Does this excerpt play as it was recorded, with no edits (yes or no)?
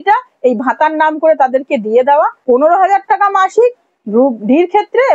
no